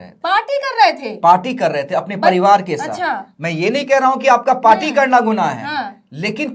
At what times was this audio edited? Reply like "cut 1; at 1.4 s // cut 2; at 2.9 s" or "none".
none